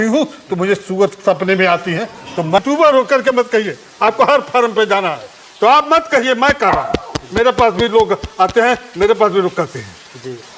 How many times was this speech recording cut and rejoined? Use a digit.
1